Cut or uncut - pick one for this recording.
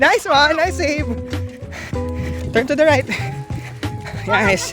cut